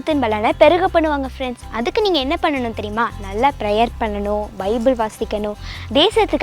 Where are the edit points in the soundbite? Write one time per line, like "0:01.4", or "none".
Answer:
none